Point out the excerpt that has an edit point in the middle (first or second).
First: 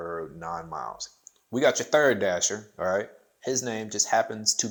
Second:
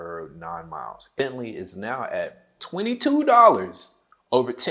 second